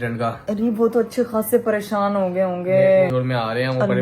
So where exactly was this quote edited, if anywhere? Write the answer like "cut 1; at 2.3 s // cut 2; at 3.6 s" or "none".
cut 1; at 3.1 s